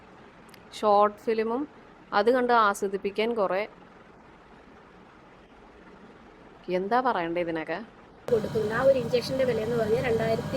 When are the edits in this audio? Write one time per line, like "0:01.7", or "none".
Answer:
0:08.3